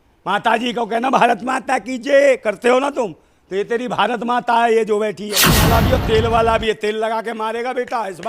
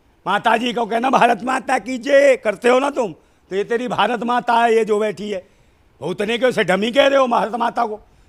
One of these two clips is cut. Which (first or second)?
first